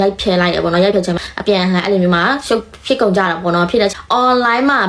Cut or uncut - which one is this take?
cut